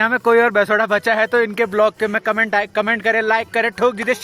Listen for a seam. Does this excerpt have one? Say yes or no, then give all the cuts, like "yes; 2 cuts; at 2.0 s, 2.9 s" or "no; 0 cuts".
no; 0 cuts